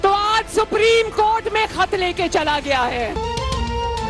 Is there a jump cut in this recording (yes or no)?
yes